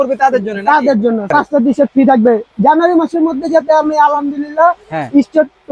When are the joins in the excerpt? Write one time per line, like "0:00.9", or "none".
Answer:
0:01.3